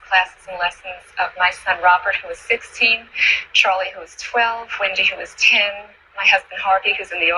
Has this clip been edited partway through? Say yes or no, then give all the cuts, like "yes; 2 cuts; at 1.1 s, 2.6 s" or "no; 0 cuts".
yes; 1 cut; at 6.1 s